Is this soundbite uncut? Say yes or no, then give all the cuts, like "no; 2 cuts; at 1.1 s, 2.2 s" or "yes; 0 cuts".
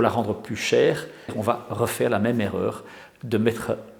no; 1 cut; at 1.3 s